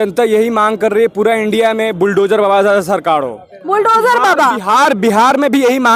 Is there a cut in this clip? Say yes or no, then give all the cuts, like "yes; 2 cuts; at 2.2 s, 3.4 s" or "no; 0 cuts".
no; 0 cuts